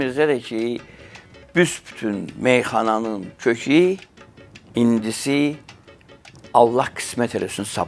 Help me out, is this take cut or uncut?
uncut